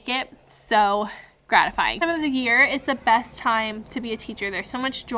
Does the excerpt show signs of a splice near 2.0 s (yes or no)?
yes